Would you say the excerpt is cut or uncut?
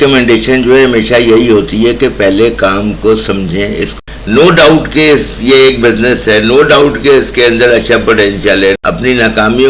cut